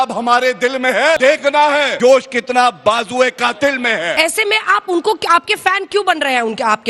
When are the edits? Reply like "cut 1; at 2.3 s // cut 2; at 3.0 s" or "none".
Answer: cut 1; at 1.7 s // cut 2; at 4.1 s

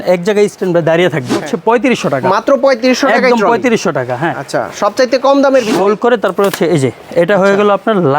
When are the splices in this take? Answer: cut 1; at 1.4 s // cut 2; at 5.7 s

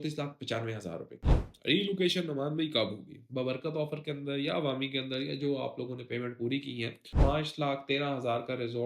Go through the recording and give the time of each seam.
cut 1; at 1.4 s // cut 2; at 7.1 s

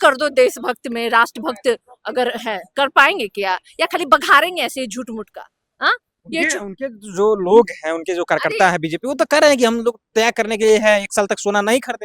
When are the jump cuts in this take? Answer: none

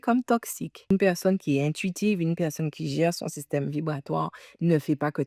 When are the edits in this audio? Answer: cut 1; at 0.9 s

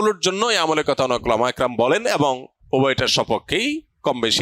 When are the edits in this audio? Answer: cut 1; at 2.5 s

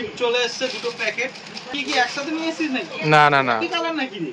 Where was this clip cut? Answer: cut 1; at 1.8 s

